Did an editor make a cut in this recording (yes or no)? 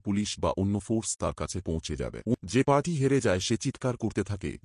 yes